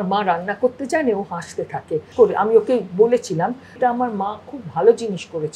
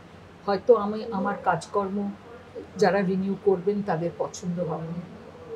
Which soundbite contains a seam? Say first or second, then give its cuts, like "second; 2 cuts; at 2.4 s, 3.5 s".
first; 2 cuts; at 2.1 s, 3.8 s